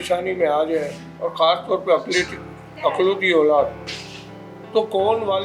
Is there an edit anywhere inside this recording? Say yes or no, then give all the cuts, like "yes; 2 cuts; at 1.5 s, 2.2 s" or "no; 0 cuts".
no; 0 cuts